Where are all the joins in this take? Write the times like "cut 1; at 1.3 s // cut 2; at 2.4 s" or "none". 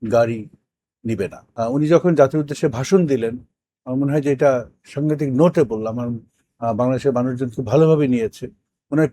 cut 1; at 1.4 s